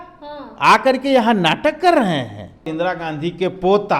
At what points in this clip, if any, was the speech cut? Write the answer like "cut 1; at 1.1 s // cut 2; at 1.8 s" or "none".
cut 1; at 2.7 s